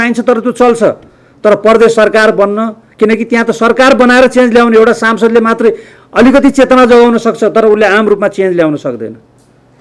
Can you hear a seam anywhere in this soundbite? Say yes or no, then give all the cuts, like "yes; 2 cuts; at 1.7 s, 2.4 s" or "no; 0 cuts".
no; 0 cuts